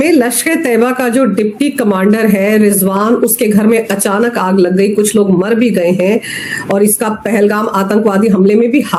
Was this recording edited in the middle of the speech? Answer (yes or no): no